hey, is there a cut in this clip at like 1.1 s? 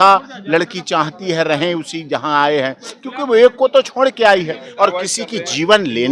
no; 1 cut; at 4.6 s

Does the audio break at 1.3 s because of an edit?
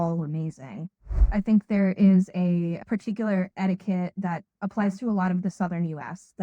yes; 1 cut; at 1.3 s

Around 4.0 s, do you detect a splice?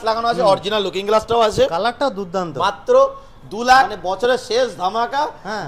yes; 1 cut; at 4.0 s

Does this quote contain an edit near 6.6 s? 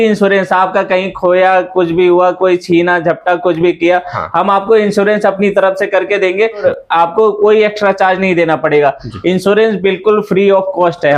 yes; 1 cut; at 6.6 s

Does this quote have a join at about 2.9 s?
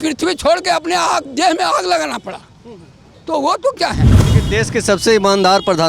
no; 1 cut; at 4.3 s

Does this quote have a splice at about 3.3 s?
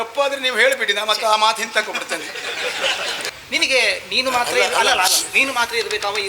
yes; 1 cut; at 3.3 s

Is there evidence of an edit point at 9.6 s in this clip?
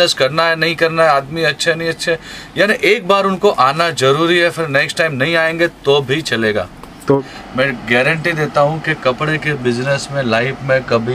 no; 1 cut; at 7.2 s

